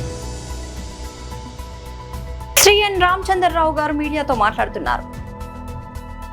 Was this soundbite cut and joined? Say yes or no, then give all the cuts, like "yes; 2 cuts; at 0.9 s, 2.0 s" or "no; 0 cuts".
yes; 1 cut; at 2.5 s